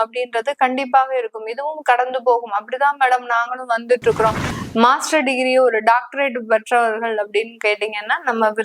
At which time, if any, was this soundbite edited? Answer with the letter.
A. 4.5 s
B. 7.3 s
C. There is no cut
A